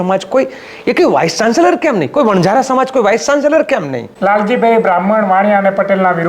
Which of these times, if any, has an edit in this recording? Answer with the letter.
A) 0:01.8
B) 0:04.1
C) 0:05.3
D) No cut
B